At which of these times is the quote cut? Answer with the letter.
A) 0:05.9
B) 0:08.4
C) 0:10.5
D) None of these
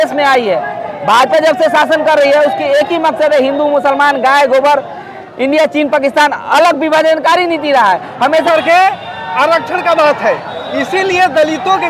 B